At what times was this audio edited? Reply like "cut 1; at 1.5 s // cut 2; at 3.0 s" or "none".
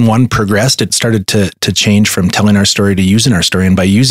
cut 1; at 0.9 s